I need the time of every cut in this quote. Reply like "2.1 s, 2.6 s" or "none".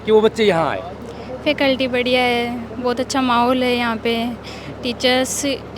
none

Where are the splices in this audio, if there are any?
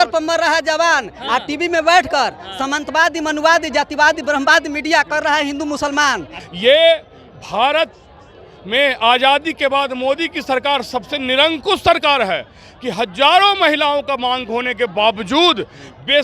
6.4 s

